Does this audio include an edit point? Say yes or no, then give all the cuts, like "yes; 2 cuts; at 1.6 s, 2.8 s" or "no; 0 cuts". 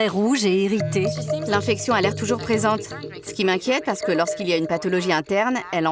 yes; 1 cut; at 1.1 s